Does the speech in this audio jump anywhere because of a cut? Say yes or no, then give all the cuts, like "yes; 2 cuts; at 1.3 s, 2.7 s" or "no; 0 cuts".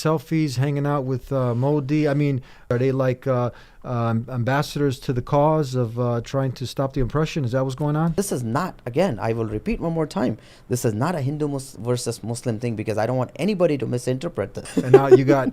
yes; 3 cuts; at 2.7 s, 8.1 s, 14.6 s